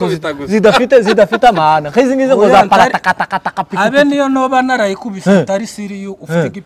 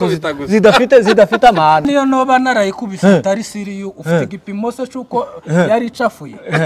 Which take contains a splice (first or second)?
second